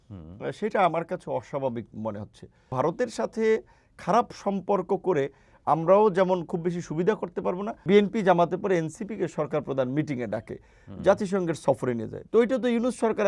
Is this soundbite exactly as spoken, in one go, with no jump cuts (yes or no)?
no